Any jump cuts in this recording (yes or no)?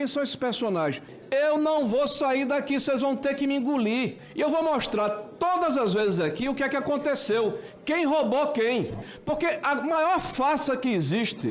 yes